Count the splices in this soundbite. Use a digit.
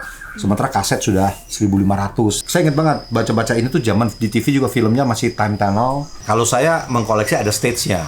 2